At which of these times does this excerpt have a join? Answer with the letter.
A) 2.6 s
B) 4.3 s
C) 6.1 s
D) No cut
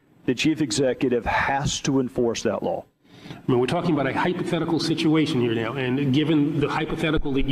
C